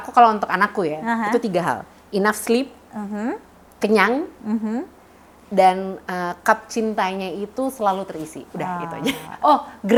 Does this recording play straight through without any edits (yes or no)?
yes